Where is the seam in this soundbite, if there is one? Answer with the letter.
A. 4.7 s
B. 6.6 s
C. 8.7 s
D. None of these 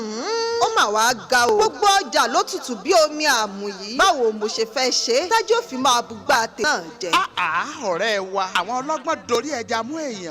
B